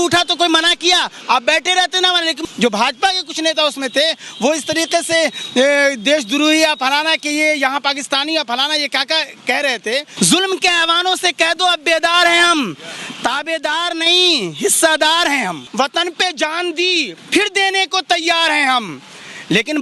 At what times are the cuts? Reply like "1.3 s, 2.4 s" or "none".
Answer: 2.4 s, 10.1 s, 15.6 s